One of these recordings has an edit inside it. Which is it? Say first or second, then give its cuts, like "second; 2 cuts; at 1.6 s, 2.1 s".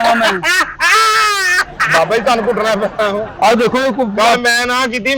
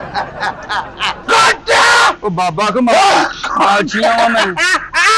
second; 1 cut; at 1.1 s